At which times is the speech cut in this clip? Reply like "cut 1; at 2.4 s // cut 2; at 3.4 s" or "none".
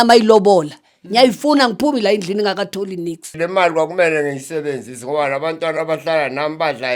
cut 1; at 3.3 s